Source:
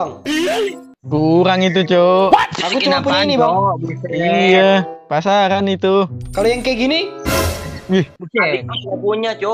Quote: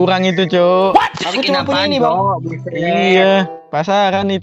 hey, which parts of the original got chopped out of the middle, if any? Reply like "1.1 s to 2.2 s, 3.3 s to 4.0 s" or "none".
none

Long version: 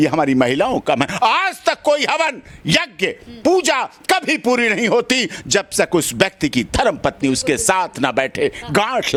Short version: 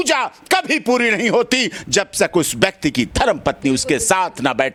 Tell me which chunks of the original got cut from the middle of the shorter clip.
none

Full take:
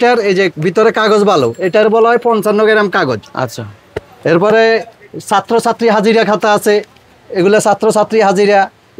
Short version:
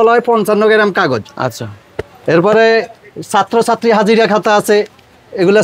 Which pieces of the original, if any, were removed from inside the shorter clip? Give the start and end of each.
none

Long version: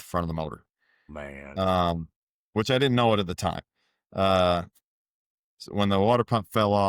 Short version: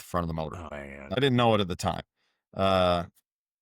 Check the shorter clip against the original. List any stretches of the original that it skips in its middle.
1.2 s to 2.8 s

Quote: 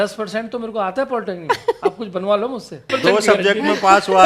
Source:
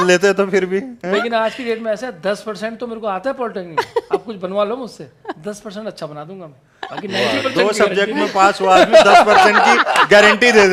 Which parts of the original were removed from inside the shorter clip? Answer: 5.2 s to 7.4 s

